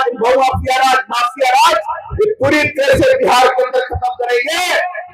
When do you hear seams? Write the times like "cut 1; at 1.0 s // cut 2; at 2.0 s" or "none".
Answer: none